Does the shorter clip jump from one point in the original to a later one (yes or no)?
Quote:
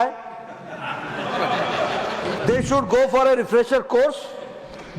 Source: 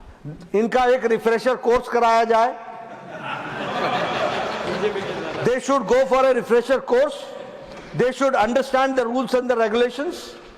yes